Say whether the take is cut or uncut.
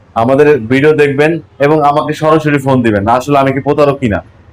uncut